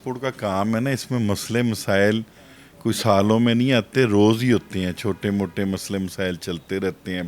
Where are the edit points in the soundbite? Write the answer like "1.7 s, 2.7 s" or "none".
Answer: none